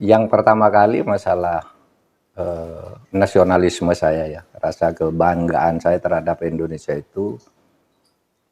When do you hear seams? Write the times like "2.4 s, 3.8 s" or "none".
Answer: none

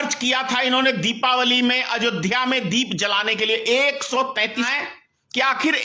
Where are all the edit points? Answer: 4.7 s

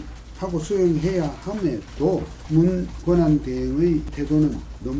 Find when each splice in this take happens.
2.4 s, 4.1 s

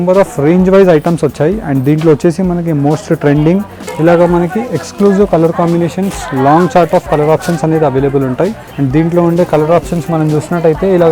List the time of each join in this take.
3.8 s, 8.7 s

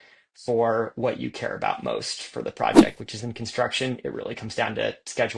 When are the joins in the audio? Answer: none

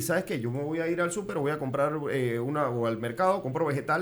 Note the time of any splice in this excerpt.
none

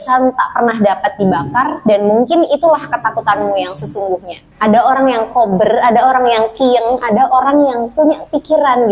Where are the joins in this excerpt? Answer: 4.4 s

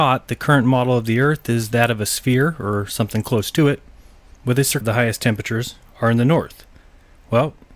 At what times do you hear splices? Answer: none

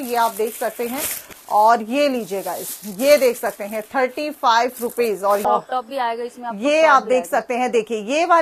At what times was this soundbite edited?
1.2 s, 5.4 s

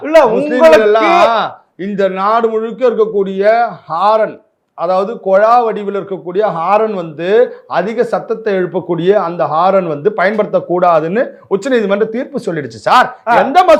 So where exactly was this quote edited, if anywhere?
none

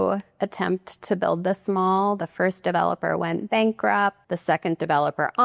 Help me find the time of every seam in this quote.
4.3 s

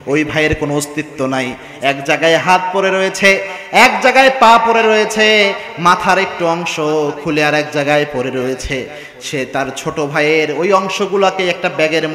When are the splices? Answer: none

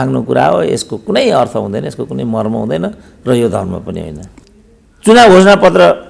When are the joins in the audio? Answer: 4.3 s

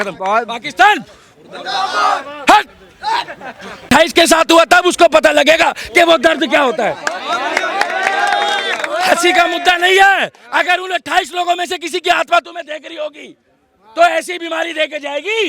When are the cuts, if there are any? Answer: 3.9 s

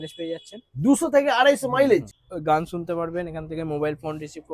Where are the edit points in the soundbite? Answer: 2.2 s

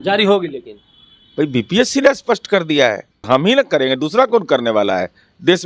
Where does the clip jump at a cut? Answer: 3.3 s

